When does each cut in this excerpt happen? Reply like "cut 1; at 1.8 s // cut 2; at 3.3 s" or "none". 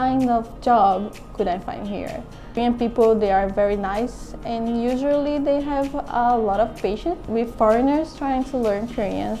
cut 1; at 2.6 s // cut 2; at 7.2 s